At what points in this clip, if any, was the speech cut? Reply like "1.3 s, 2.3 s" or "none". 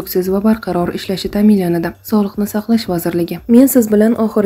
3.4 s